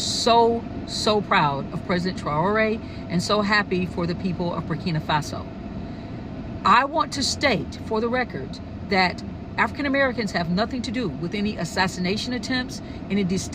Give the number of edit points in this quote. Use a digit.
0